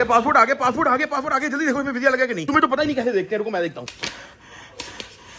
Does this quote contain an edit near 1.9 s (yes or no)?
no